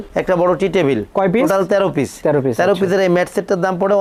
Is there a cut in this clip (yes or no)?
no